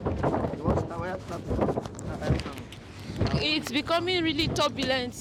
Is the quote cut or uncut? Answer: uncut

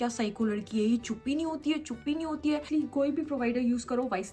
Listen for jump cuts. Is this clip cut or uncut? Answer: cut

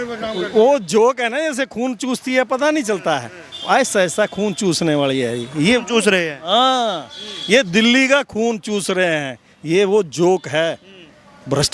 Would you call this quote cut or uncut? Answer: uncut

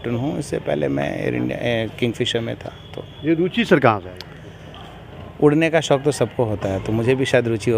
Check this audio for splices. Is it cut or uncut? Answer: uncut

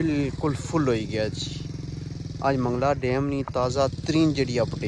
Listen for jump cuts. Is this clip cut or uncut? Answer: uncut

